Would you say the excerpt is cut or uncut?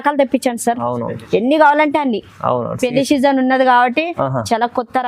uncut